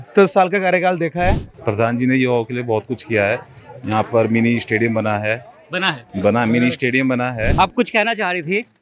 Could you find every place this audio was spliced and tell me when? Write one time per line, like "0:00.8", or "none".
0:01.5
0:07.6